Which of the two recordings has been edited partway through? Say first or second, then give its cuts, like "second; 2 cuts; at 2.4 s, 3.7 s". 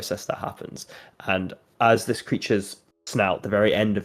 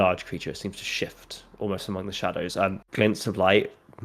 second; 1 cut; at 2.8 s